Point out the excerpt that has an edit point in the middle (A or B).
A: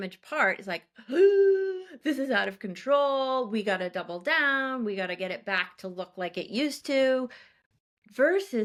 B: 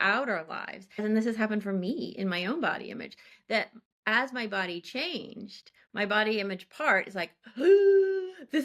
B